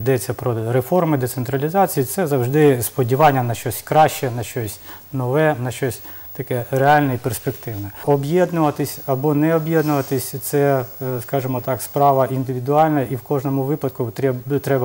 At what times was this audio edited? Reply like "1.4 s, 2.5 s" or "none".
8.0 s